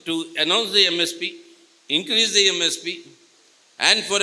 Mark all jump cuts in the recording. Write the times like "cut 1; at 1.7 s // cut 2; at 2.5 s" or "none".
none